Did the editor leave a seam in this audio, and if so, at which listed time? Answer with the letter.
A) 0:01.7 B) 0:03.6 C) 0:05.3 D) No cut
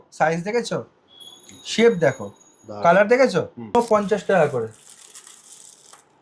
B